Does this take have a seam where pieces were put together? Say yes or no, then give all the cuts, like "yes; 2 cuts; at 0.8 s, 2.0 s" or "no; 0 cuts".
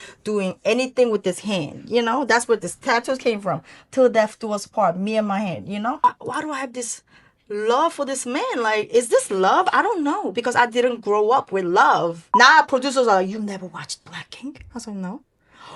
yes; 2 cuts; at 6.0 s, 12.2 s